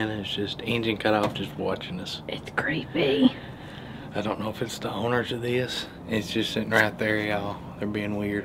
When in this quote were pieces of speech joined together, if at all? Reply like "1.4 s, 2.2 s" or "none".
5.9 s

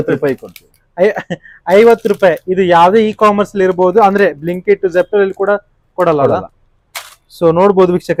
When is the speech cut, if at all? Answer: none

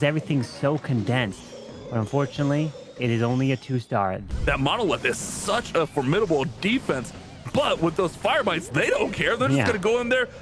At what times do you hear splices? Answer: 4.2 s

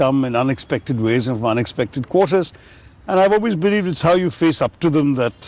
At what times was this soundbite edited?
none

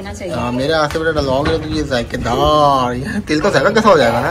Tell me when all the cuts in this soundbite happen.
none

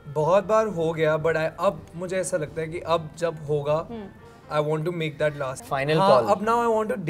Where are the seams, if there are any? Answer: 5.6 s

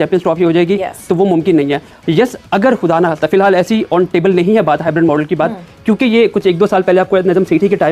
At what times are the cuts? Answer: none

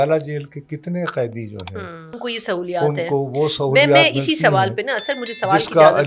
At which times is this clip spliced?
none

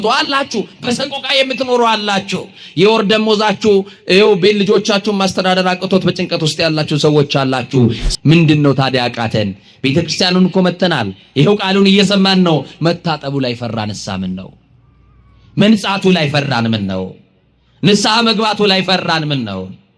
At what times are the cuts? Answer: 8.1 s

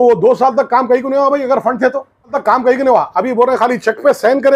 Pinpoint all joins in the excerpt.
2.4 s

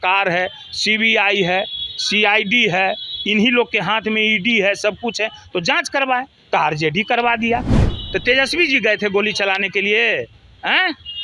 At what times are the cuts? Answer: none

